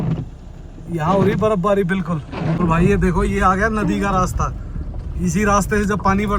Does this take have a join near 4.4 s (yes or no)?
no